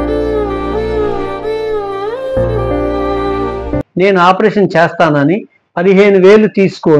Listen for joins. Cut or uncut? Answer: cut